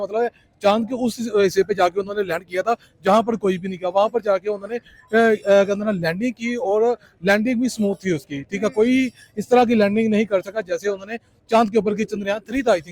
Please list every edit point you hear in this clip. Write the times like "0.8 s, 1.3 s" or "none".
none